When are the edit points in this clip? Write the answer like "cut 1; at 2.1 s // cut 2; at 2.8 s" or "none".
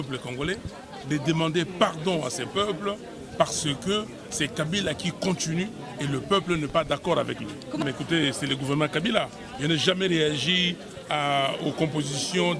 cut 1; at 7.8 s